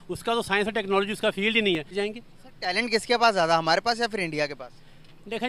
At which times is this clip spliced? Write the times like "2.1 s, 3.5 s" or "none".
1.9 s